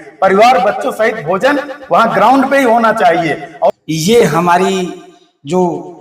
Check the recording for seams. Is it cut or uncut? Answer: cut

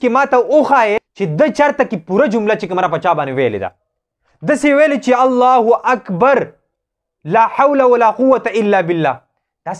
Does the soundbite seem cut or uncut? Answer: cut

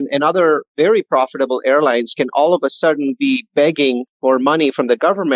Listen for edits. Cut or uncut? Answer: cut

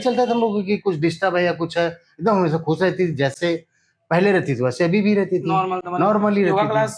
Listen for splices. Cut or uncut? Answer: uncut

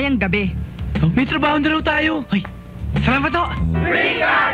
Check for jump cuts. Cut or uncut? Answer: cut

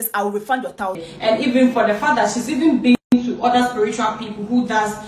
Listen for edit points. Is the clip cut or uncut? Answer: cut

